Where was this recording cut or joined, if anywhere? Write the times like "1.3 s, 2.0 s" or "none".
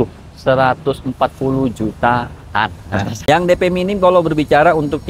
3.3 s